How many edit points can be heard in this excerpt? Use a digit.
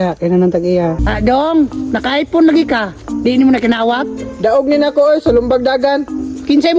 1